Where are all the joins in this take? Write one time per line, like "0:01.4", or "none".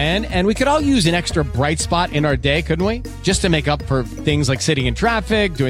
none